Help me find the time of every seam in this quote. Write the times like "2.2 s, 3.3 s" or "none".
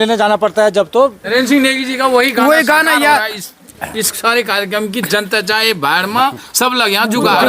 1.2 s